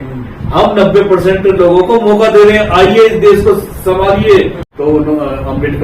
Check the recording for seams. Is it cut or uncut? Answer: cut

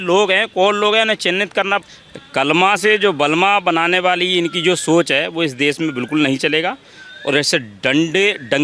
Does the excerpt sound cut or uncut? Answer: cut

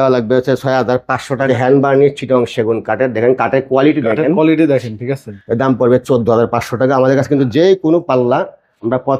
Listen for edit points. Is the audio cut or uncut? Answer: cut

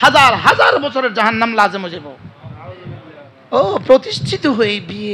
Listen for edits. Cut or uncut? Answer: cut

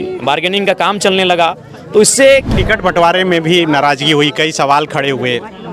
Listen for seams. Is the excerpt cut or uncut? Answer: cut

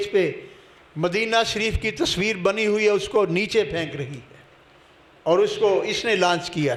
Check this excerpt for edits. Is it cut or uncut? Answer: uncut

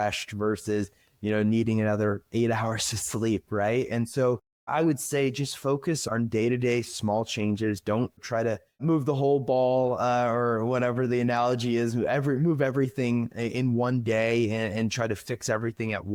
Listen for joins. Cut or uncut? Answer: uncut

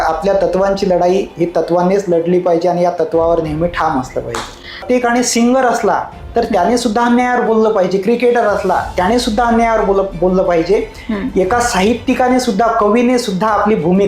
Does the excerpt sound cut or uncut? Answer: cut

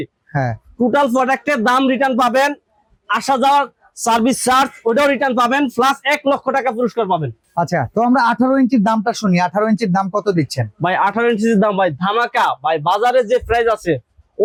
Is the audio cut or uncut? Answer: uncut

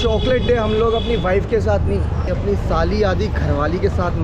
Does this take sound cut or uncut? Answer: uncut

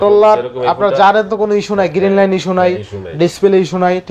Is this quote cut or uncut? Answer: uncut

